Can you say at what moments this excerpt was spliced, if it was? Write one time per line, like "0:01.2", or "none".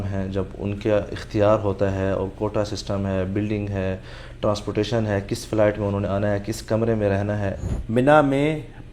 0:07.7